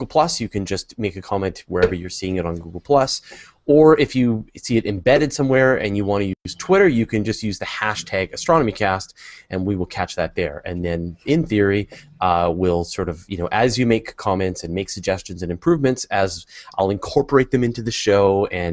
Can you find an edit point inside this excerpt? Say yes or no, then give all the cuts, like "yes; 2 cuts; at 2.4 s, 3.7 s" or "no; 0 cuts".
yes; 1 cut; at 9.5 s